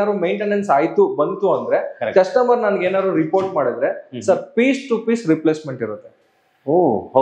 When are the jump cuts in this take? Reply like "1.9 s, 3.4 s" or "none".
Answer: none